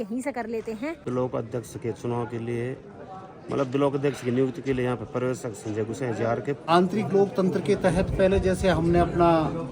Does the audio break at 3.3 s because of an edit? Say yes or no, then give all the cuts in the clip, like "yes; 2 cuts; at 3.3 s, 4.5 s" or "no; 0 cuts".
no; 2 cuts; at 1.0 s, 6.6 s